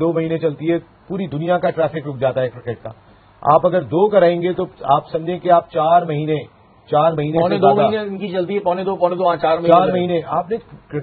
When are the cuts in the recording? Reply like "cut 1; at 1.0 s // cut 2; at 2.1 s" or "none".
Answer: none